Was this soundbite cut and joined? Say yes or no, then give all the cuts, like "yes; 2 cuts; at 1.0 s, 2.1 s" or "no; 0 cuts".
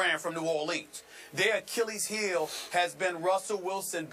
yes; 1 cut; at 1.1 s